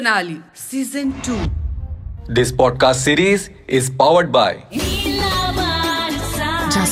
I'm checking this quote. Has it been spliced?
no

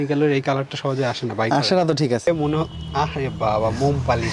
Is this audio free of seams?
no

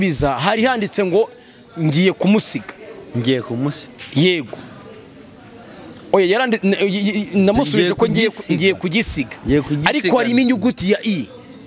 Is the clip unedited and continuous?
yes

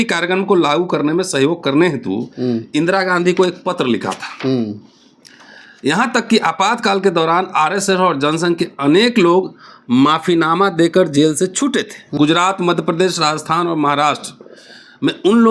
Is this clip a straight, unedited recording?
no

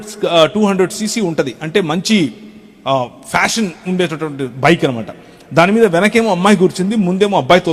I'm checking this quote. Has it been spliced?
no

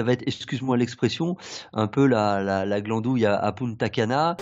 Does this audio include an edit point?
no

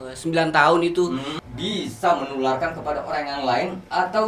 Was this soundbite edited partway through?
yes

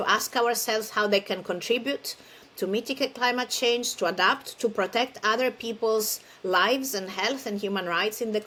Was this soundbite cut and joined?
no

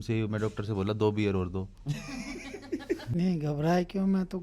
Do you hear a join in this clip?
yes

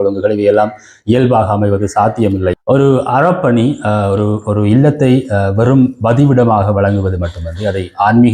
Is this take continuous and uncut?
no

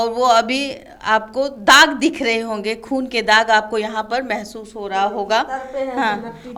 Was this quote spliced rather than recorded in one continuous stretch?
no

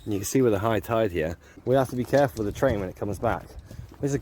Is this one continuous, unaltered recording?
no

